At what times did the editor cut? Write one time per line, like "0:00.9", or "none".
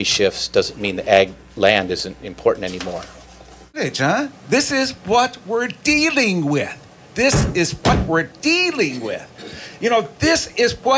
0:03.8